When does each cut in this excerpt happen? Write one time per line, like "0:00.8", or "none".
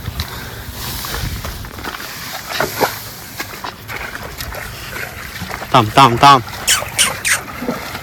none